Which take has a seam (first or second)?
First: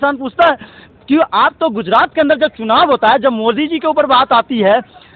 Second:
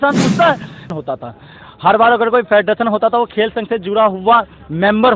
second